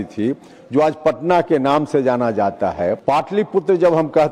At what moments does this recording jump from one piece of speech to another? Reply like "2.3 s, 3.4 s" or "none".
3.0 s